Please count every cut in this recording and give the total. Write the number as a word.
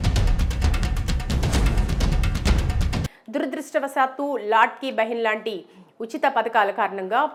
zero